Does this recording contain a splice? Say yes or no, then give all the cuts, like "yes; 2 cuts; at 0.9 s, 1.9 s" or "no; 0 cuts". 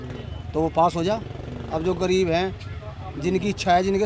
no; 0 cuts